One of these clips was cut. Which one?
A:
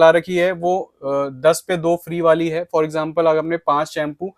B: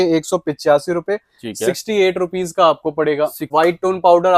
B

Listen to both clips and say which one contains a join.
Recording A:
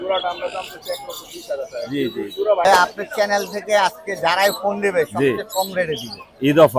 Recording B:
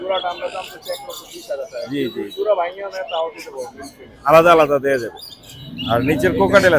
A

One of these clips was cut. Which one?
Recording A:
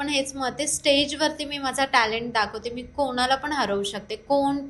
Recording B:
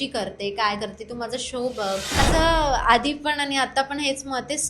B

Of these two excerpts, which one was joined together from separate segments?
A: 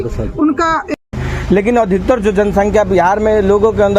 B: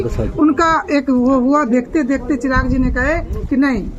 A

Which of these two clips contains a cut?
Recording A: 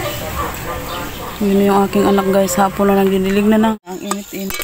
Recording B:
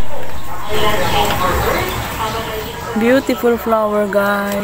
A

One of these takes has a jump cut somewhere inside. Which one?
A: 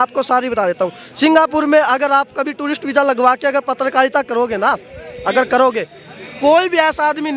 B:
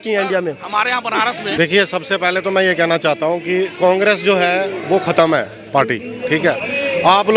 B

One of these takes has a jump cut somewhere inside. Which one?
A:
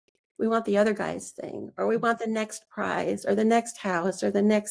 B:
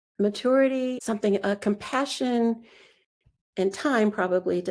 B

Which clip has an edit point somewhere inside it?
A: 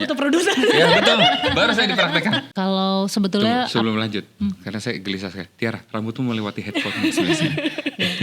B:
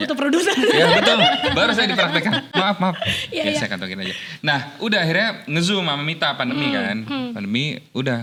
A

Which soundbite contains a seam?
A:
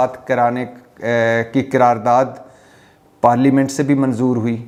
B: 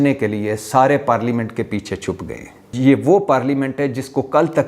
B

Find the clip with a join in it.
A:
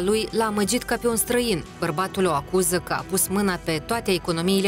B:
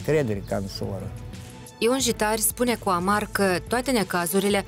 B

